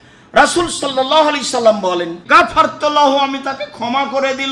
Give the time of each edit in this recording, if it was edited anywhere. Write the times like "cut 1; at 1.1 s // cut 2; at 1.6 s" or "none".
cut 1; at 2.2 s